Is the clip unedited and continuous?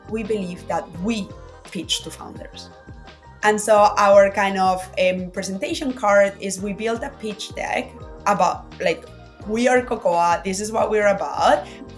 yes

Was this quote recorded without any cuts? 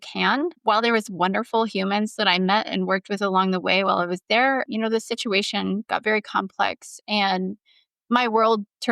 yes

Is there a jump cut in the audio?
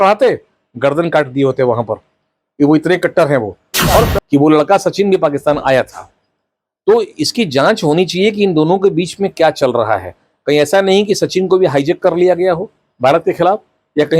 yes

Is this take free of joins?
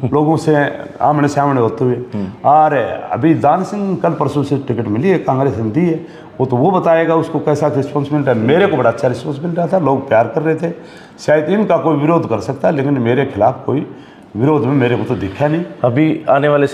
yes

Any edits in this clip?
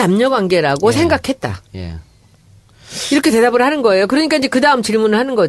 no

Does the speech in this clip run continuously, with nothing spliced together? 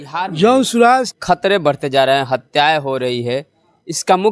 no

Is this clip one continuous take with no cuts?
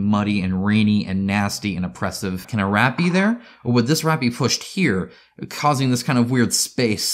no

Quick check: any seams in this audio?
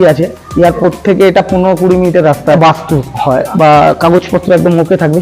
yes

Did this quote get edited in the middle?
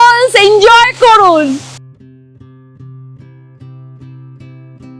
no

